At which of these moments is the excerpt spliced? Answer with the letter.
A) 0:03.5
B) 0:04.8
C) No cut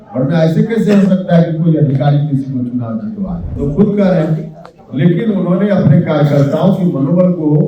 A